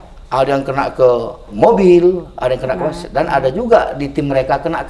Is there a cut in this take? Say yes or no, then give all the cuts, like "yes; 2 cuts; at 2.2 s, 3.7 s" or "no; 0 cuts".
yes; 1 cut; at 1.5 s